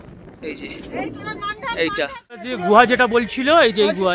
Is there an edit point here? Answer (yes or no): yes